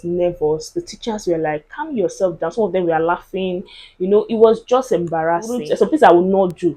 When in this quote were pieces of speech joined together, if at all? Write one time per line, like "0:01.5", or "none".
0:05.6